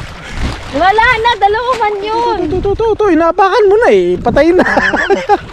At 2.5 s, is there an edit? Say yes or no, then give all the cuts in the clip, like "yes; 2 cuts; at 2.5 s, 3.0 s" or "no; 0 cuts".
yes; 1 cut; at 2.5 s